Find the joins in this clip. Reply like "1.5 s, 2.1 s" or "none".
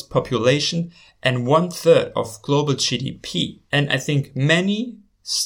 3.6 s